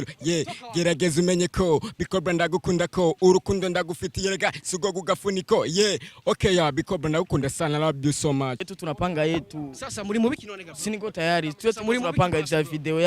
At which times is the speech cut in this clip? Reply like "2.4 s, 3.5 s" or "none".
8.6 s